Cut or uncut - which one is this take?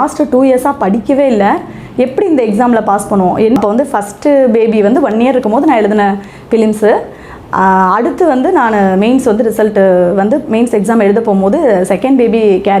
cut